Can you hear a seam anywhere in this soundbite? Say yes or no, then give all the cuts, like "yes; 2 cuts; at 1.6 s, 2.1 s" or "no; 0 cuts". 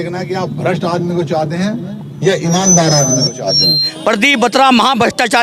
yes; 1 cut; at 3.9 s